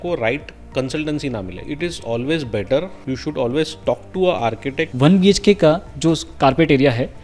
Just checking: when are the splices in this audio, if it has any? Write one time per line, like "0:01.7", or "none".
0:01.6
0:02.9
0:04.8